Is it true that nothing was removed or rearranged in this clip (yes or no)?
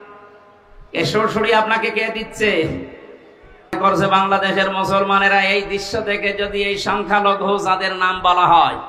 no